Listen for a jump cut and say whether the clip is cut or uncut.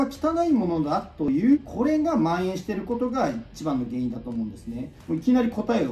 cut